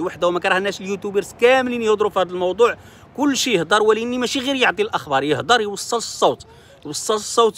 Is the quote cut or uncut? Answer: uncut